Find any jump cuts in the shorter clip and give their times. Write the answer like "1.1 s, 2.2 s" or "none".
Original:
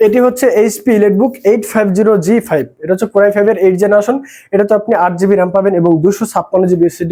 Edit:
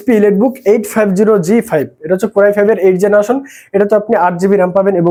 none